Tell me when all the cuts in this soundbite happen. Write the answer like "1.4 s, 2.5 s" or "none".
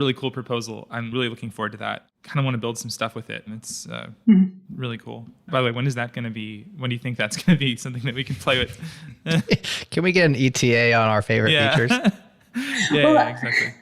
1.4 s